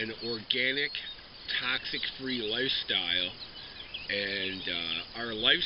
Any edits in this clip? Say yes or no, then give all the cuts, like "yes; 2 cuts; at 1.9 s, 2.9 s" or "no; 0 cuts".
yes; 1 cut; at 3.5 s